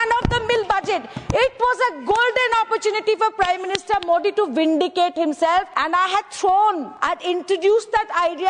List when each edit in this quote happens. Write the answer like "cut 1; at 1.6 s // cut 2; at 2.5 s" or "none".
cut 1; at 5.8 s // cut 2; at 6.9 s